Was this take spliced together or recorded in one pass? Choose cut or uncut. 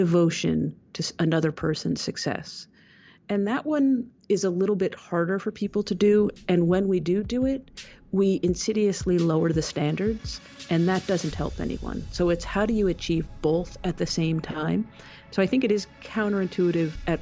uncut